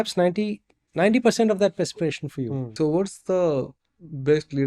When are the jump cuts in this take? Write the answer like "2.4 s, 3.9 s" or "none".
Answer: 2.7 s